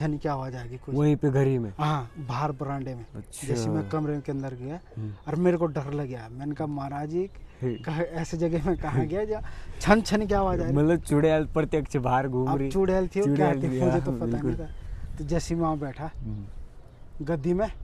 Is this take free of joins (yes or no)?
yes